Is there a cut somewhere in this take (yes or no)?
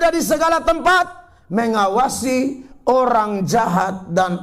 no